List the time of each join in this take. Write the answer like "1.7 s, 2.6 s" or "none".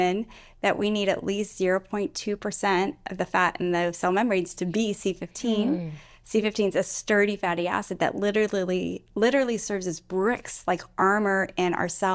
none